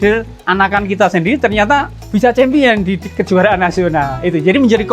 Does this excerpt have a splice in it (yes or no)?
yes